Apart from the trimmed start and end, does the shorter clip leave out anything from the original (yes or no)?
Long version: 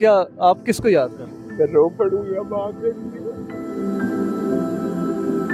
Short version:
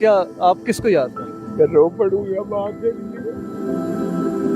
yes